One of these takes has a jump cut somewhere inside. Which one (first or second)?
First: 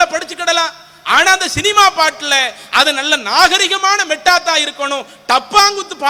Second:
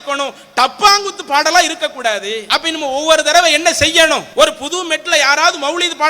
second